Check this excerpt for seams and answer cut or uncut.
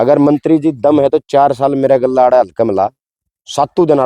uncut